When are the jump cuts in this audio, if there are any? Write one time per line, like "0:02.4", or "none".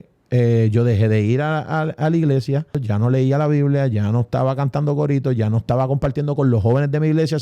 0:02.8